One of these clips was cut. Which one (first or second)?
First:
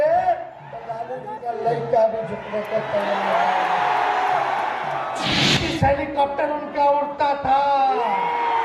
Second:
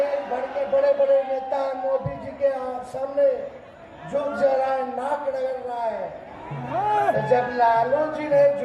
first